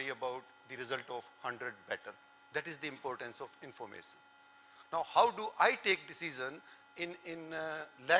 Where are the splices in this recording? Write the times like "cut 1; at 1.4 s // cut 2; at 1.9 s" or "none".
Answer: none